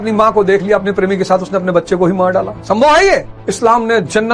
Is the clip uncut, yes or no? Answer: no